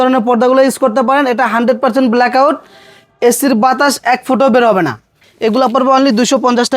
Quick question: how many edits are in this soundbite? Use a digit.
1